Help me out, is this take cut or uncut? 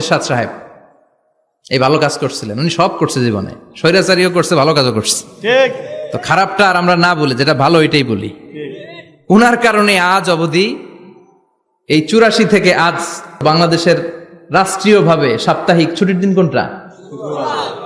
cut